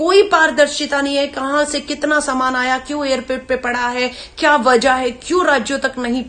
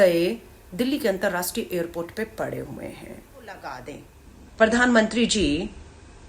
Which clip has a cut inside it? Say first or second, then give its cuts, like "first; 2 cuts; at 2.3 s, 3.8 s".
second; 1 cut; at 3.8 s